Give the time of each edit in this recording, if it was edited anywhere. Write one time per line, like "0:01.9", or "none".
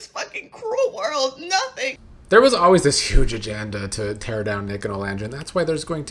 0:02.0